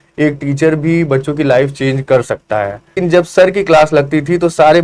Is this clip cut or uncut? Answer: cut